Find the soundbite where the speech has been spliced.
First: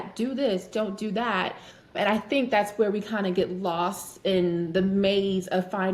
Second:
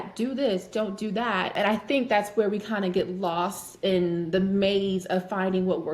second; 1 cut; at 1.5 s

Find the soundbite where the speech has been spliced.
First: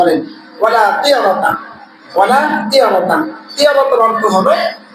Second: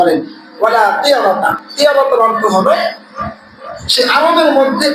second; 1 cut; at 1.6 s

